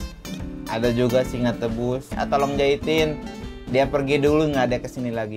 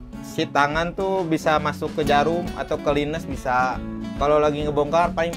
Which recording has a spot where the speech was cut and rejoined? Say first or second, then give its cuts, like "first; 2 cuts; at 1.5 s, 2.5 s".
first; 1 cut; at 2.1 s